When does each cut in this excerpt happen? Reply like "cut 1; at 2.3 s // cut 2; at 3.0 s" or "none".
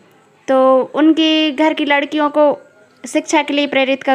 none